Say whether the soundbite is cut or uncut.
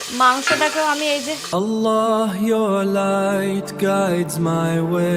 cut